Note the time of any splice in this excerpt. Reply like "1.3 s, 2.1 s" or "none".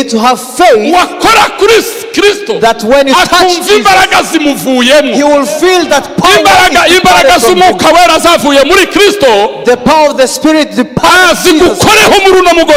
none

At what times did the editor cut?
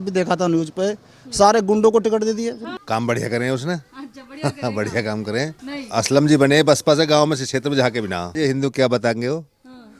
2.7 s, 5.6 s, 8.3 s

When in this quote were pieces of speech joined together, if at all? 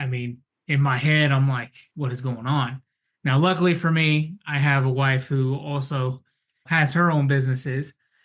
1.8 s

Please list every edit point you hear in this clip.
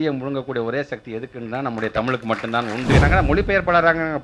3.0 s

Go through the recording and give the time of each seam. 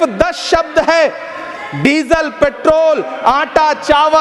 none

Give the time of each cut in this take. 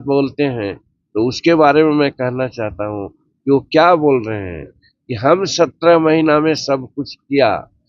none

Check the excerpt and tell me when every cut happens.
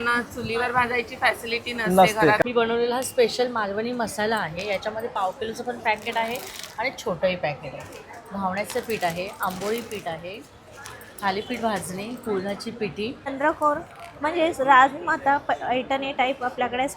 2.4 s, 13.3 s

